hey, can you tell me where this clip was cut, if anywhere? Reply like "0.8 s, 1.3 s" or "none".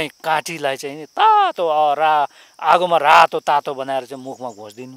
none